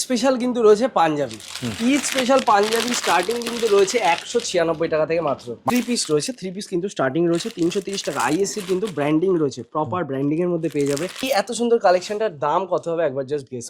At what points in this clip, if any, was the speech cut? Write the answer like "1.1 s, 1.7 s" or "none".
5.6 s, 11.2 s